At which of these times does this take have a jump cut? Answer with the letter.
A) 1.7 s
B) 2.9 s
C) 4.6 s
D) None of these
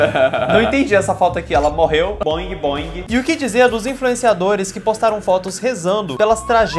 B